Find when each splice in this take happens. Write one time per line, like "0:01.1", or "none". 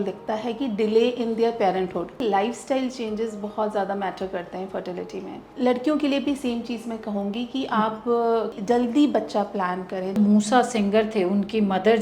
0:02.2
0:05.4
0:08.6
0:10.1